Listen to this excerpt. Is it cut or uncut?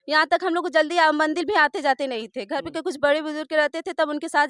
uncut